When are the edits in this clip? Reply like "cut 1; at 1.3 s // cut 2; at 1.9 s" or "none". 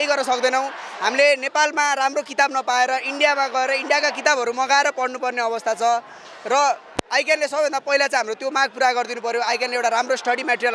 none